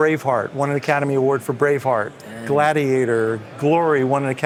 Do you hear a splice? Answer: no; 0 cuts

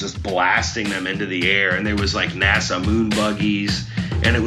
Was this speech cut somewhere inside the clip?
no; 0 cuts

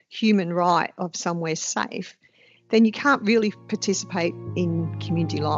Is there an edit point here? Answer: no; 0 cuts

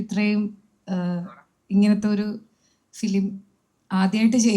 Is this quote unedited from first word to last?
yes; 0 cuts

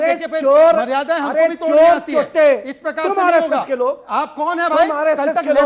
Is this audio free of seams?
yes; 0 cuts

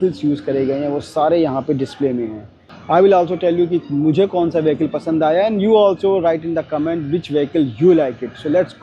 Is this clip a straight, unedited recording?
yes; 0 cuts

